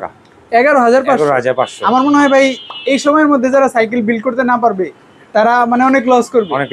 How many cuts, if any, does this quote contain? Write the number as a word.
zero